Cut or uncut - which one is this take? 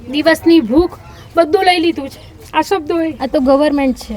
cut